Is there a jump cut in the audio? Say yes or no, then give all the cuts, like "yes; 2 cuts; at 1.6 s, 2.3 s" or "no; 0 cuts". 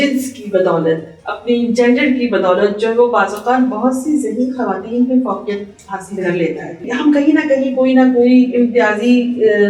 yes; 1 cut; at 6.9 s